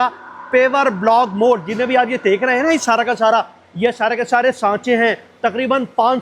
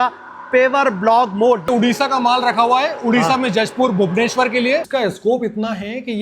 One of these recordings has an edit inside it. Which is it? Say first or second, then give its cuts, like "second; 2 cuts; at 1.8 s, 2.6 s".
second; 2 cuts; at 1.7 s, 4.9 s